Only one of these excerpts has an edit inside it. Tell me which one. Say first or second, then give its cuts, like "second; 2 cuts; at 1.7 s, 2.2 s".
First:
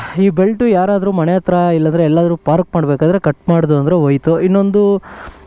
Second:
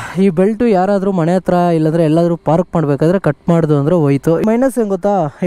second; 1 cut; at 4.4 s